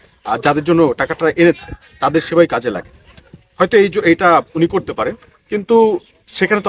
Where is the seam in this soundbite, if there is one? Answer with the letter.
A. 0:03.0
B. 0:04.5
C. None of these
C